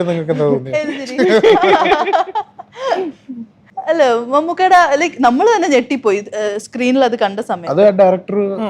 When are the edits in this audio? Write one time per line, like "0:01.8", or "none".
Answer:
none